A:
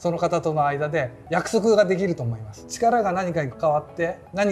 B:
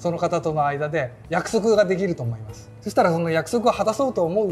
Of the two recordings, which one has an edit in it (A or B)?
A